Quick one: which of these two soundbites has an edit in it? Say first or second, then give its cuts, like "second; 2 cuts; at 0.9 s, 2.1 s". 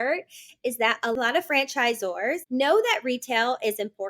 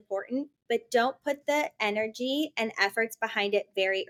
first; 2 cuts; at 1.1 s, 2.4 s